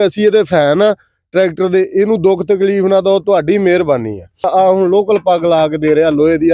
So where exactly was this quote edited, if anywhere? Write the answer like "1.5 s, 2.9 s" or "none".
4.5 s